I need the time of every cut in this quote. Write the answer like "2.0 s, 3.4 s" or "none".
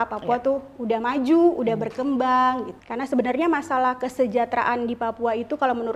2.8 s